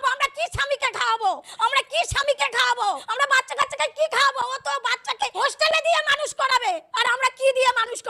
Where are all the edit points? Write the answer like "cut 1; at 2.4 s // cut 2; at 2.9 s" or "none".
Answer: cut 1; at 1.5 s // cut 2; at 3.1 s // cut 3; at 5.3 s // cut 4; at 6.9 s